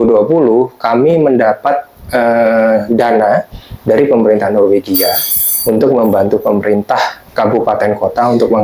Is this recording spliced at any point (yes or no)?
no